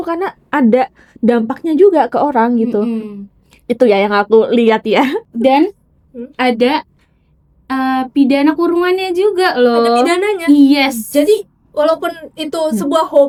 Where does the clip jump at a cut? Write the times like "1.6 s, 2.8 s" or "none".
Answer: none